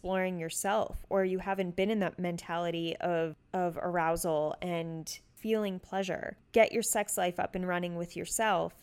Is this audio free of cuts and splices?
no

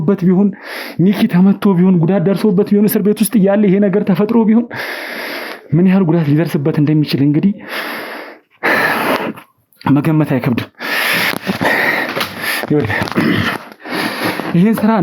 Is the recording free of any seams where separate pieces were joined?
yes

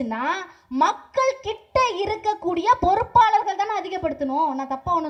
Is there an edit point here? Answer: no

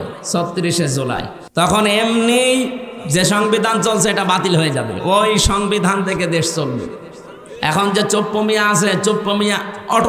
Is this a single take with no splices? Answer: no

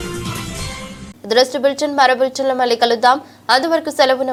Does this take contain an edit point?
no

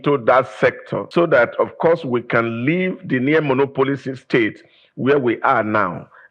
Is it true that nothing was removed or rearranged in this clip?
no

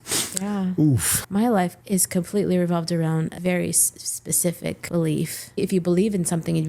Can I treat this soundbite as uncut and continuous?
no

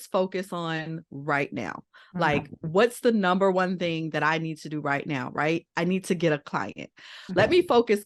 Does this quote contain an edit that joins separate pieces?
no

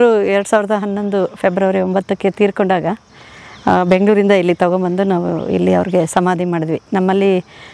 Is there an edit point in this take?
no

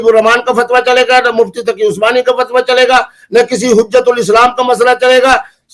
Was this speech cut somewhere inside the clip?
no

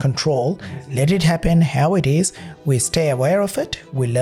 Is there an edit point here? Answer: no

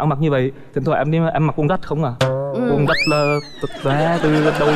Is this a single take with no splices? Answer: yes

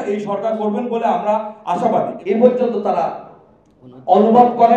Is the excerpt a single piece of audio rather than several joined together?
no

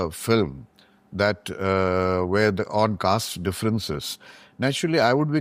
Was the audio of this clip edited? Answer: no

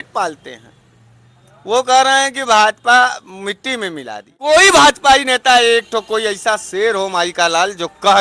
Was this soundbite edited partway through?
yes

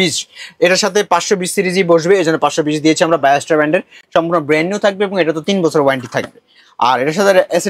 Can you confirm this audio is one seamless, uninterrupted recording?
yes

